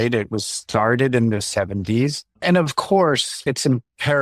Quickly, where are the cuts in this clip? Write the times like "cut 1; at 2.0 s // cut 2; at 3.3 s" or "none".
cut 1; at 2.3 s